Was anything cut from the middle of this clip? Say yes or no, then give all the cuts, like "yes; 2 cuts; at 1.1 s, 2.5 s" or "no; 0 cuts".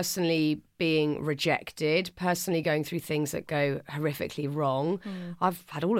no; 0 cuts